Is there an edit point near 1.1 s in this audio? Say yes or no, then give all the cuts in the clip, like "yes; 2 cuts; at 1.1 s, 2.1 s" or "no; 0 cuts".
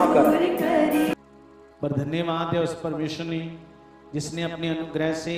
yes; 1 cut; at 1.1 s